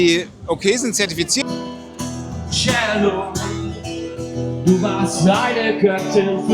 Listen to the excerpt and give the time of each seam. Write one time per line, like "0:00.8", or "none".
0:01.4